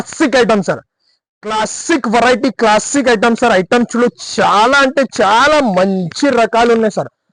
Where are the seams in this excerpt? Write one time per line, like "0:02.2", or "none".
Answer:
none